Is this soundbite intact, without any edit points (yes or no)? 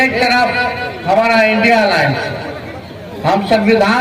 yes